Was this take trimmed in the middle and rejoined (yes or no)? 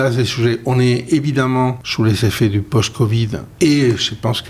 yes